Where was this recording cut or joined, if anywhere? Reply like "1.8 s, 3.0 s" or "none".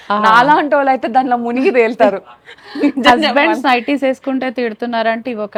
none